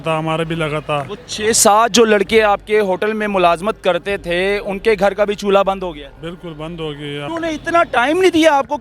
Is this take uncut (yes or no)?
no